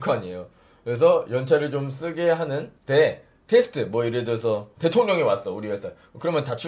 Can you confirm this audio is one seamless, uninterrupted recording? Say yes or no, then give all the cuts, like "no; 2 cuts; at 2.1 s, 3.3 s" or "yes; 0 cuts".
no; 1 cut; at 4.7 s